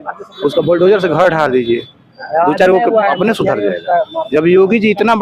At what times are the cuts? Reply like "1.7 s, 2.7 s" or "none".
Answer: none